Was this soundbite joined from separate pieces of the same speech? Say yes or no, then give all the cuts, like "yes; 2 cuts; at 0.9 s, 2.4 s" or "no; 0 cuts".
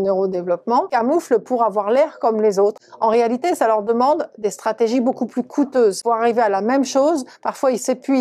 yes; 2 cuts; at 0.9 s, 6.0 s